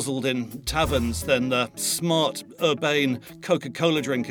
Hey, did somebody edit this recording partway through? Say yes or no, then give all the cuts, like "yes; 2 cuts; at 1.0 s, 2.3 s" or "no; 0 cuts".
yes; 1 cut; at 1.7 s